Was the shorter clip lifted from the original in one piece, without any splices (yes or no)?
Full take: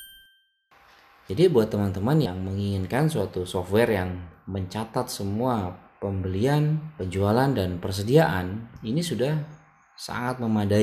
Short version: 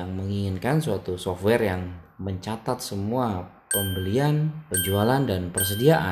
yes